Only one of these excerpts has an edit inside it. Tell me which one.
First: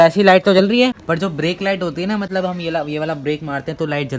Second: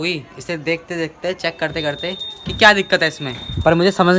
first; 1 cut; at 1.0 s

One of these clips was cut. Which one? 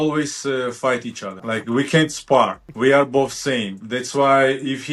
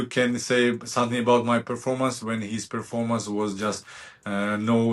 first; 2 cuts; at 1.3 s, 2.6 s

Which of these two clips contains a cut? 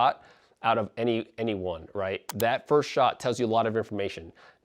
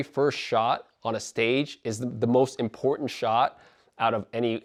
first; 1 cut; at 2.3 s

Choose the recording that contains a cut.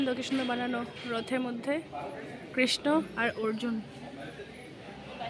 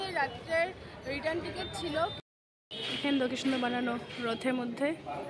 second; 1 cut; at 2.2 s

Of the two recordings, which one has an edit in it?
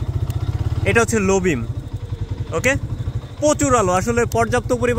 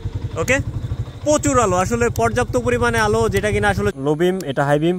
second; 1 cut; at 3.9 s

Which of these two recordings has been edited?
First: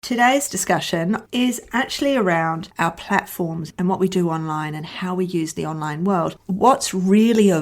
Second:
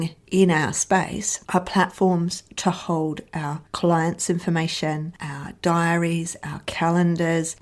first; 3 cuts; at 1.2 s, 3.6 s, 6.3 s

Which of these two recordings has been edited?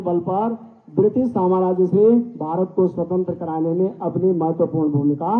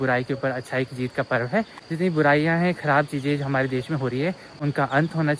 second; 1 cut; at 1.9 s

